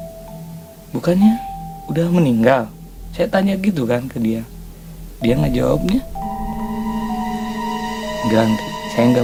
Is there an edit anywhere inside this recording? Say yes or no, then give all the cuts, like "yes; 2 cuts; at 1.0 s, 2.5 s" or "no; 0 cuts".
no; 0 cuts